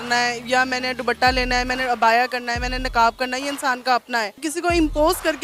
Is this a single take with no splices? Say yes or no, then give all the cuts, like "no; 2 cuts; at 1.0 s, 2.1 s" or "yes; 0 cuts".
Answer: no; 1 cut; at 4.4 s